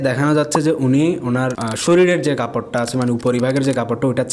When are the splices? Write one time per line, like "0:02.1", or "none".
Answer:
none